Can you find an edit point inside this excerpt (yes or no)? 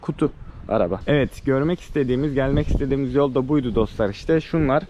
no